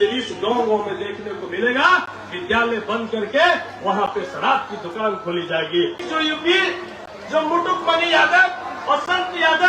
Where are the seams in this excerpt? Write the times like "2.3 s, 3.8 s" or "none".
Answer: 6.0 s